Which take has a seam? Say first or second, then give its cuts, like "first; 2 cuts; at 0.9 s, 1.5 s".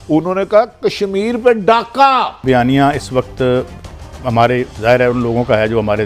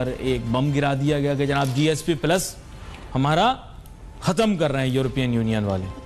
first; 1 cut; at 2.4 s